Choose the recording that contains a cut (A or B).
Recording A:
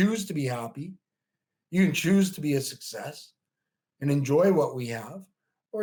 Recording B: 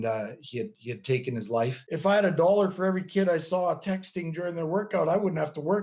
B